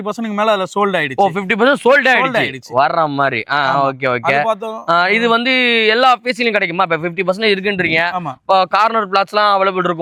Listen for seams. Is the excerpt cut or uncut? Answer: uncut